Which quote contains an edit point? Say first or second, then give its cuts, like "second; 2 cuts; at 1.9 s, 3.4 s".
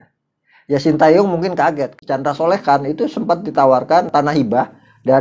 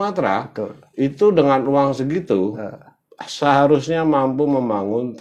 first; 2 cuts; at 1.9 s, 4.1 s